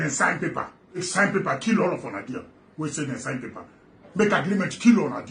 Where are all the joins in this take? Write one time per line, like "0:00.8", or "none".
0:01.0